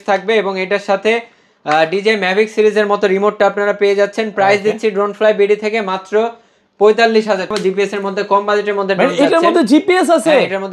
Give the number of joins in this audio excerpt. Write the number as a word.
one